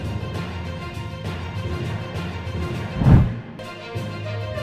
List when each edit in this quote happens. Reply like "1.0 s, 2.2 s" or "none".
2.9 s, 3.6 s